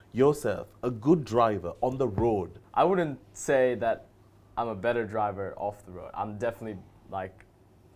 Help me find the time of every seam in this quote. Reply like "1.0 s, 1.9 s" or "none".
2.6 s

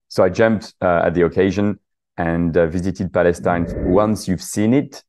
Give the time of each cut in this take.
3.7 s

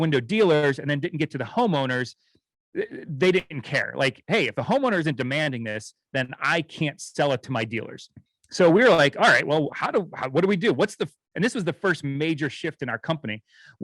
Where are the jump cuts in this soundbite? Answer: none

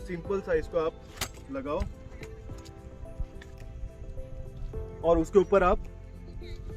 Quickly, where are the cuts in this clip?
none

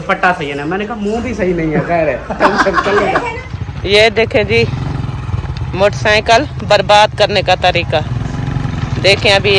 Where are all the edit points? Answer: 3.4 s

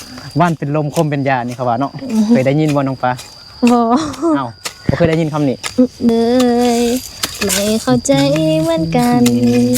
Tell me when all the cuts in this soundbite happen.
6.1 s

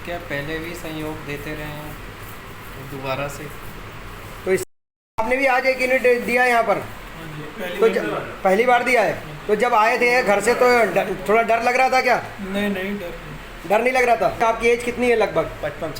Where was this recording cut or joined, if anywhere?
4.6 s, 14.4 s

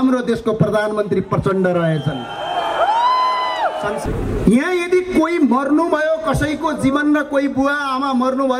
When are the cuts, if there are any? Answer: 4.0 s

